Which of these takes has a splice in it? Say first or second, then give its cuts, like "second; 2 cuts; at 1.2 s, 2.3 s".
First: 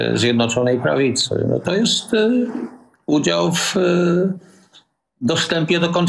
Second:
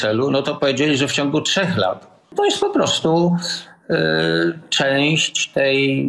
second; 1 cut; at 2.3 s